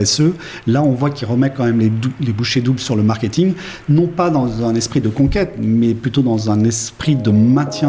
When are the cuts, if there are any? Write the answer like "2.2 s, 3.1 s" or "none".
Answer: none